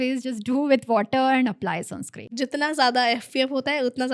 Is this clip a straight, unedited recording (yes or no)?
no